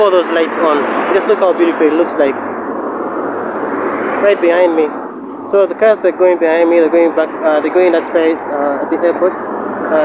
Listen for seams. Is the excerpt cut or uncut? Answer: uncut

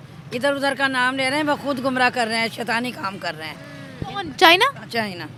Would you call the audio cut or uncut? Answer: uncut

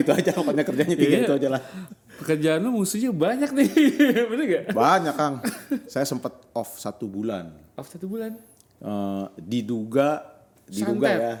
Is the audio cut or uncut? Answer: uncut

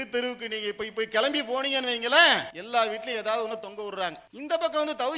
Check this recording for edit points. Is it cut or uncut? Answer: cut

